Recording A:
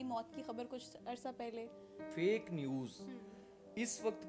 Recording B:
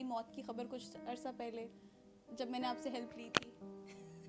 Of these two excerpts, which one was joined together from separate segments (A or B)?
A